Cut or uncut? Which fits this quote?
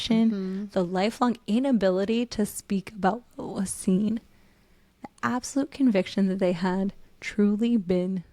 uncut